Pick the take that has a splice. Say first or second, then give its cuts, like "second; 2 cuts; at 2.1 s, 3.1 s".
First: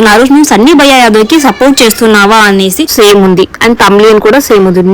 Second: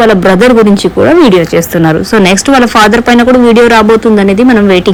first; 1 cut; at 2.9 s